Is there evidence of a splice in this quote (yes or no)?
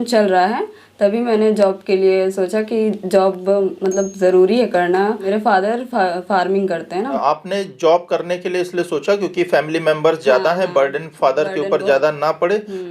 yes